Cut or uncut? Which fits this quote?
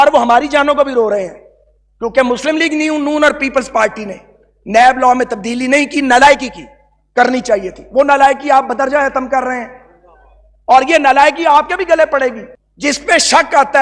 uncut